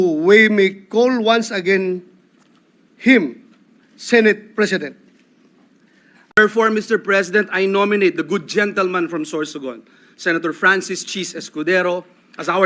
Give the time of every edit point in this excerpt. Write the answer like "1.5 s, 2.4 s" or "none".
6.4 s